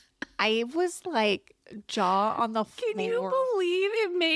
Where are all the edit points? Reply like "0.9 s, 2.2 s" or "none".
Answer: none